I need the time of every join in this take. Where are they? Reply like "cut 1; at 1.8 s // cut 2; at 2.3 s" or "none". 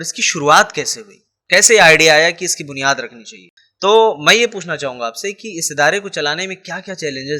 cut 1; at 3.4 s

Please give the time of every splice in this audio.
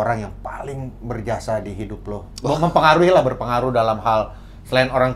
none

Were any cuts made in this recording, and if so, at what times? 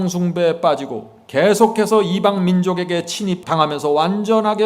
cut 1; at 3.4 s

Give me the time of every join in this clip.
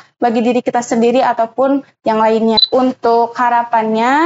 cut 1; at 2.6 s

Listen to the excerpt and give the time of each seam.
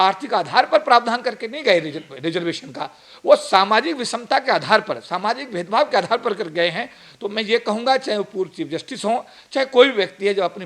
none

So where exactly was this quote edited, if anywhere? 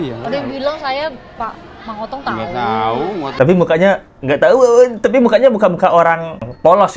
cut 1; at 3.3 s

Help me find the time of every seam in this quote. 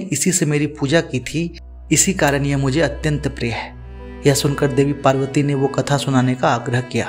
none

